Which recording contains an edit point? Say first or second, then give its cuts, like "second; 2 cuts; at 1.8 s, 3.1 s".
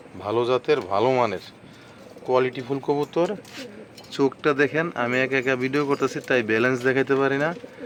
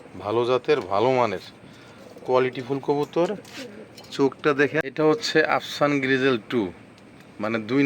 second; 1 cut; at 4.9 s